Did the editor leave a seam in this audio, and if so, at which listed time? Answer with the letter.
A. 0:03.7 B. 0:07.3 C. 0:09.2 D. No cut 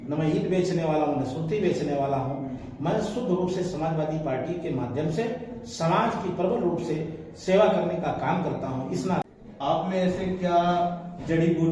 C